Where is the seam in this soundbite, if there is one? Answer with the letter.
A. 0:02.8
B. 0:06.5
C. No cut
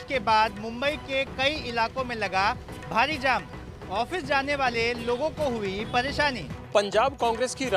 B